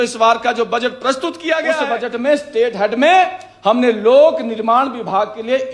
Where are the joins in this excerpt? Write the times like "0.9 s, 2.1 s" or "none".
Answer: 1.8 s